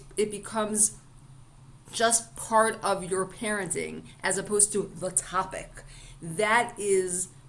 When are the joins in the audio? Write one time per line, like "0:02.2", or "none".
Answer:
none